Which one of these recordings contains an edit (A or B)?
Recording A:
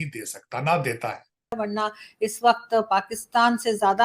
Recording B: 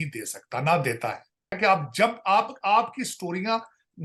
A